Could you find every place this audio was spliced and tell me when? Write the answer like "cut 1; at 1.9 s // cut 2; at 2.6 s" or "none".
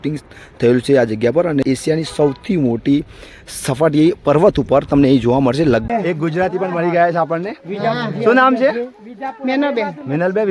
cut 1; at 1.6 s // cut 2; at 5.9 s